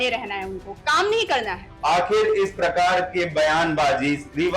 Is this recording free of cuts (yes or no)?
no